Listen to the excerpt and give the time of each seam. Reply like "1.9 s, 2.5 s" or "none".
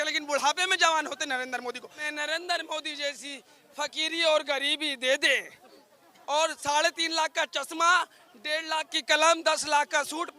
2.1 s